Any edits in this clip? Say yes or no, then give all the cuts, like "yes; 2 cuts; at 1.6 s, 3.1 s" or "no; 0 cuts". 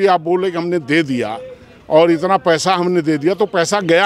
no; 0 cuts